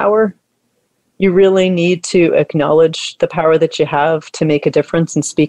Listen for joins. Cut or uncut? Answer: uncut